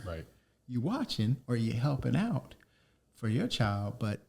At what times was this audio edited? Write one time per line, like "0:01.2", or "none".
none